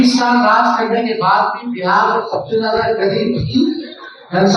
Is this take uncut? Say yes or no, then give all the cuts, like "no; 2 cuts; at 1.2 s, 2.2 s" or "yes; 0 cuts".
yes; 0 cuts